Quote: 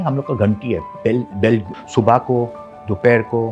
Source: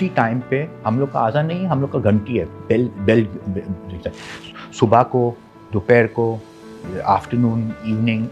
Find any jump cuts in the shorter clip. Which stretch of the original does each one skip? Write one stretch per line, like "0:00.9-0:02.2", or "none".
0:03.4-0:04.6